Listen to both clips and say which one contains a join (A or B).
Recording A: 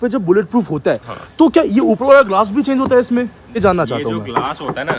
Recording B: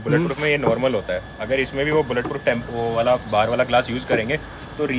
A